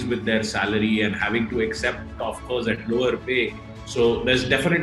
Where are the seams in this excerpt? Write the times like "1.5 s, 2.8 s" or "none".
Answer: none